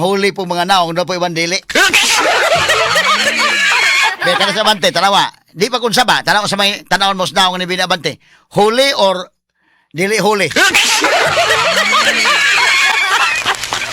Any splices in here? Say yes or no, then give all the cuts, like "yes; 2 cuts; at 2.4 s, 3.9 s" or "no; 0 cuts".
no; 0 cuts